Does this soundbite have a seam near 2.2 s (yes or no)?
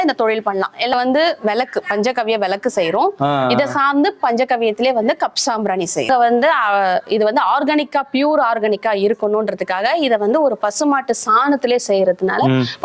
no